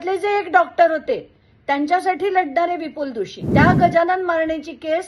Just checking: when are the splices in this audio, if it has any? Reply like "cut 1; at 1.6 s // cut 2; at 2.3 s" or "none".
cut 1; at 3.4 s